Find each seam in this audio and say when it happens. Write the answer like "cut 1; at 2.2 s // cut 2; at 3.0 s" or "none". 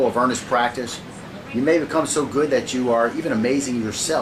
cut 1; at 3.0 s

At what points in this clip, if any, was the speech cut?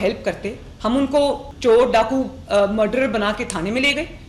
cut 1; at 1.5 s

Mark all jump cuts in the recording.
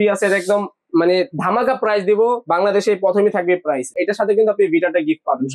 cut 1; at 3.9 s

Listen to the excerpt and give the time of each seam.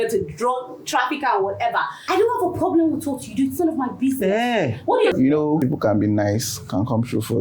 cut 1; at 2.0 s // cut 2; at 5.2 s

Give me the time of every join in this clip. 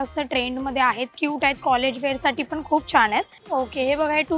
cut 1; at 3.4 s

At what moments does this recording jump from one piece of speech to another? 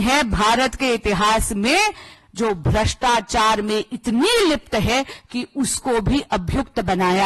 none

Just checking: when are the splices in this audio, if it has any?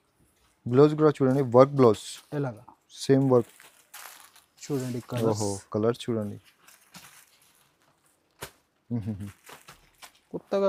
none

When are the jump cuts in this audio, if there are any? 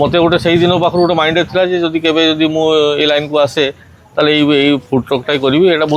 none

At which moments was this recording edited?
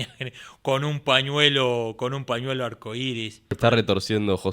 cut 1; at 3.5 s

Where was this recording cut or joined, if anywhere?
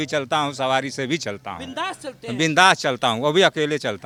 none

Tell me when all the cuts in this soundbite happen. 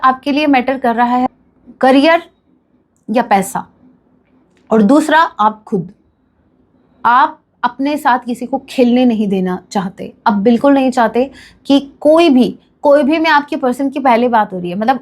cut 1; at 1.3 s

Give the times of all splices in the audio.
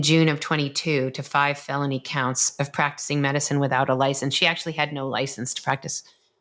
none

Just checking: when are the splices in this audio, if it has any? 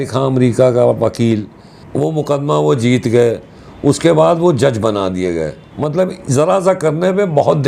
cut 1; at 1.9 s // cut 2; at 5.6 s

